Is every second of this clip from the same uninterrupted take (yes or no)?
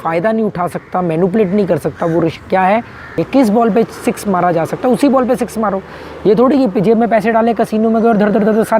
no